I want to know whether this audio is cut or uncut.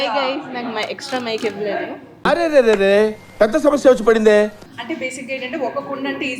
cut